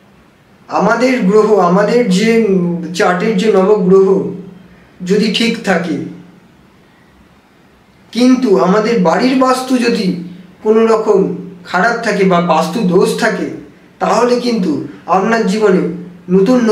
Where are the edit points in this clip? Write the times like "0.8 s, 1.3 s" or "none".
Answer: none